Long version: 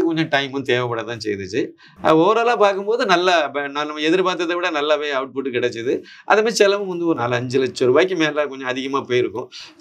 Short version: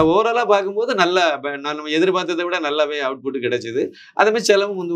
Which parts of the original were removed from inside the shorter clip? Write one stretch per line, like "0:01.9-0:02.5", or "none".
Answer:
none